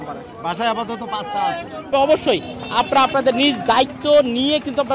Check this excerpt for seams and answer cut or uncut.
cut